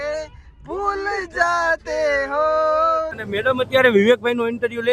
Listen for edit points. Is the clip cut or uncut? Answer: cut